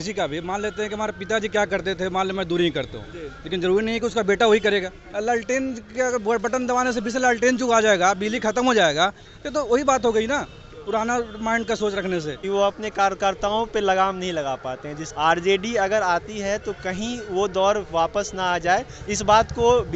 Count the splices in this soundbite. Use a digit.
3